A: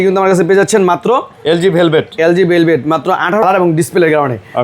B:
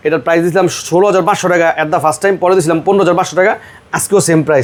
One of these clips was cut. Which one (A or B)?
A